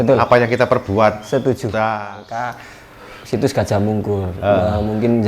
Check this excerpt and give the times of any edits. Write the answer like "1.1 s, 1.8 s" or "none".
2.0 s